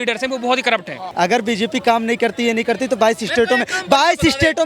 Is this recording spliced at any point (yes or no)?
yes